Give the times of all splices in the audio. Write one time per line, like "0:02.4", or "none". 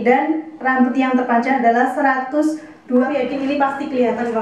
0:03.1